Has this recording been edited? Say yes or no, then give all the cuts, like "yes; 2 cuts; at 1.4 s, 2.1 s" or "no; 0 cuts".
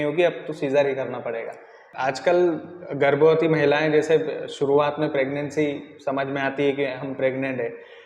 yes; 1 cut; at 1.8 s